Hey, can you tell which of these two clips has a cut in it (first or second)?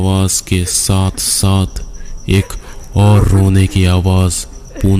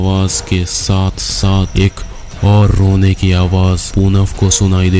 second